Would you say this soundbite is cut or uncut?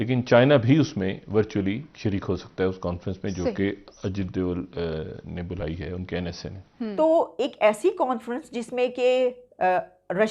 cut